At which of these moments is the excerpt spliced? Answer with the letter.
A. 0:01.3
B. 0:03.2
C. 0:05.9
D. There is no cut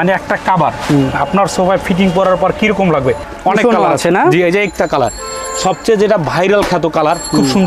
B